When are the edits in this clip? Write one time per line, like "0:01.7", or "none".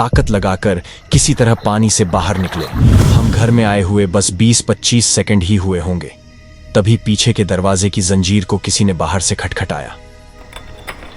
0:03.1